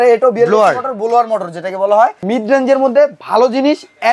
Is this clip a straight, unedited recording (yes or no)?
no